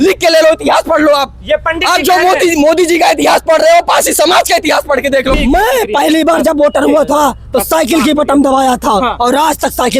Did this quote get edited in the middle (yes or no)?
yes